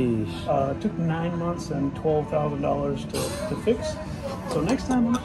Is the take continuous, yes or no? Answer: yes